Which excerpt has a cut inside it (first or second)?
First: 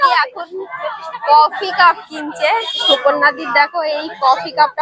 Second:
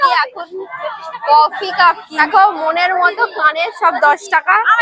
second